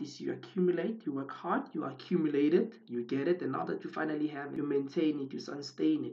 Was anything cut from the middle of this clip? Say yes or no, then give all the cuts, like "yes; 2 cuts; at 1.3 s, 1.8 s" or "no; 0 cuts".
no; 0 cuts